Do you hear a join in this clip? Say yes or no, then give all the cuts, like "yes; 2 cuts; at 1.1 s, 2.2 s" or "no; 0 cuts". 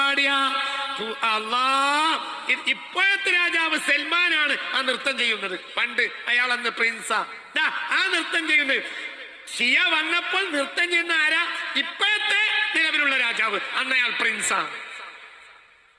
no; 0 cuts